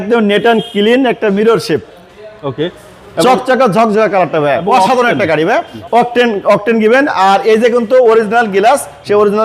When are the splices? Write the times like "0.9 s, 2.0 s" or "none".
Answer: 5.8 s